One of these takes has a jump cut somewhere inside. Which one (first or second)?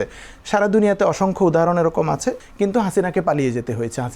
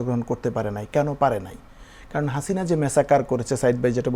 first